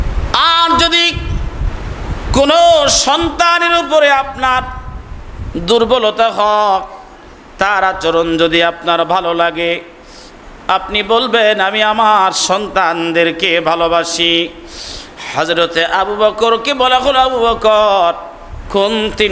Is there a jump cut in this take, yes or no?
no